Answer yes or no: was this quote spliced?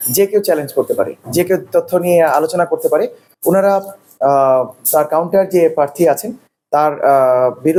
no